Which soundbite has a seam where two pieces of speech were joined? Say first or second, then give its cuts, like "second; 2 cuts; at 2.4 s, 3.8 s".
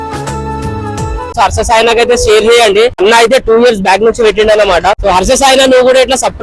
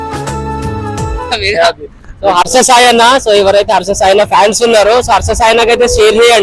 first; 3 cuts; at 1.3 s, 3.0 s, 5.0 s